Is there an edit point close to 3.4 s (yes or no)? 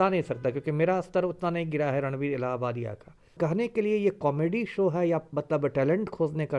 yes